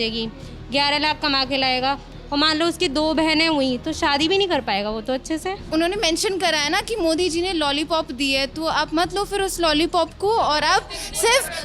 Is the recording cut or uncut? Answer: cut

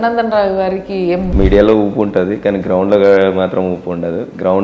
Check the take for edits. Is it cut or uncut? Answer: cut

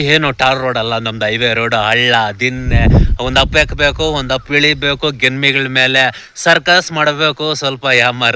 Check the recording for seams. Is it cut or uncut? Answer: uncut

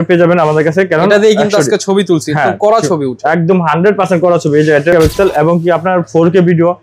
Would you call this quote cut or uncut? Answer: cut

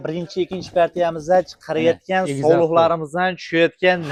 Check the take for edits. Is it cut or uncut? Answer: uncut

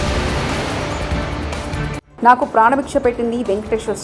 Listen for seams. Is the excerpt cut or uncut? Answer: cut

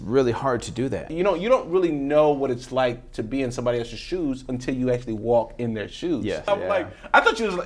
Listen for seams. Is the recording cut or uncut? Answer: cut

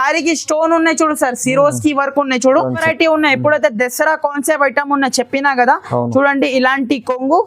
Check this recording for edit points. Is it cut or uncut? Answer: cut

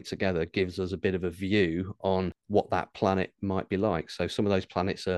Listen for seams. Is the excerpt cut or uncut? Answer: cut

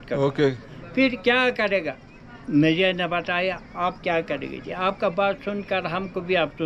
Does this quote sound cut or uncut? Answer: uncut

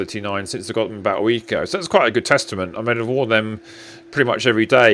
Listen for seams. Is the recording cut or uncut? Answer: uncut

